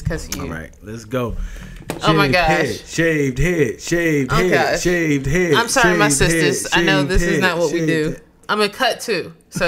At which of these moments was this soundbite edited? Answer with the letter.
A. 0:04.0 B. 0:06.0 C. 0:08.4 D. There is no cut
C